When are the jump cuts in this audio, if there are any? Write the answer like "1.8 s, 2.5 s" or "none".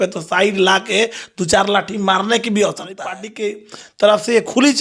3.3 s